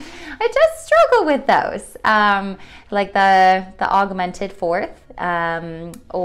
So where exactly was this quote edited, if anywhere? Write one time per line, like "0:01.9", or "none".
none